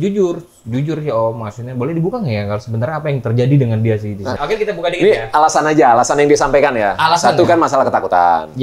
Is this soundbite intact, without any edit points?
no; 1 cut; at 4.4 s

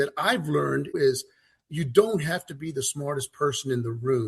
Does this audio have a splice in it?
yes; 1 cut; at 0.9 s

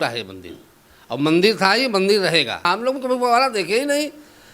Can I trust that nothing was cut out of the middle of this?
no; 1 cut; at 2.7 s

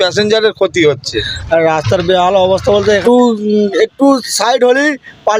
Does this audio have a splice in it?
yes; 2 cuts; at 1.3 s, 3.0 s

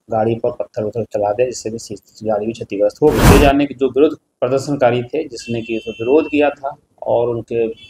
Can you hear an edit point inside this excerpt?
yes; 1 cut; at 3.2 s

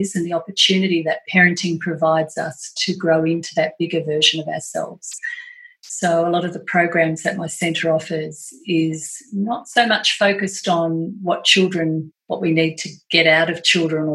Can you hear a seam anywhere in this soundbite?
no; 0 cuts

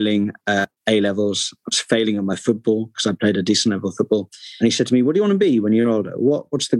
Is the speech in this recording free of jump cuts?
yes; 0 cuts

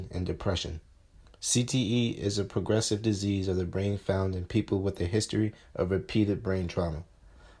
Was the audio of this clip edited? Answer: no; 0 cuts

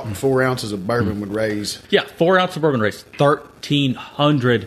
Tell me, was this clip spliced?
yes; 1 cut; at 1.7 s

